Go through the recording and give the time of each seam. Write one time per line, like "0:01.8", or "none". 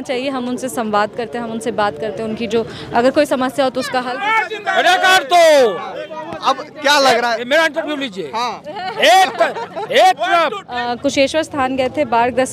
0:04.1
0:10.9